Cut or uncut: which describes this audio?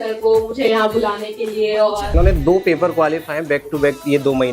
cut